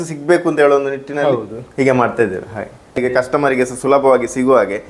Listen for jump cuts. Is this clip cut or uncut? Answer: cut